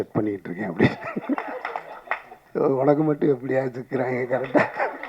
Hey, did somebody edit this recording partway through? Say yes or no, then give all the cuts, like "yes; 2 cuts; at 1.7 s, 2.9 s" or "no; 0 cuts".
yes; 1 cut; at 2.4 s